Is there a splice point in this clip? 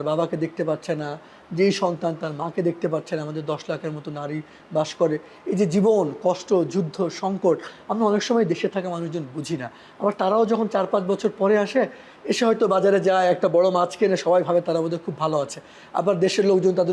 no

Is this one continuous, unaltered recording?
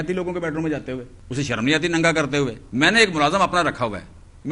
no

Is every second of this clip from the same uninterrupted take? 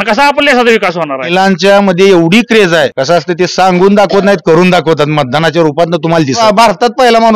no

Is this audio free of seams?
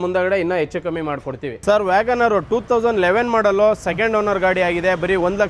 yes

